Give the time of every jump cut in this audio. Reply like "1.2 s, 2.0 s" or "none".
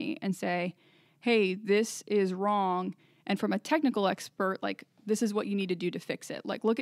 none